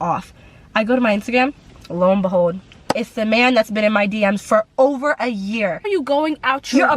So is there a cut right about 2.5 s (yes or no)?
no